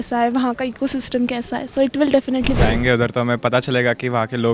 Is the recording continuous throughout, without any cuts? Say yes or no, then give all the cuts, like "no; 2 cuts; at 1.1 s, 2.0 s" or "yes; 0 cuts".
no; 1 cut; at 2.6 s